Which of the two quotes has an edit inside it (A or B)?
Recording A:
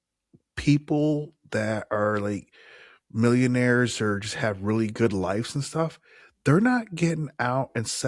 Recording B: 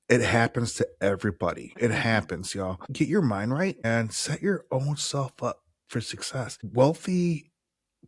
B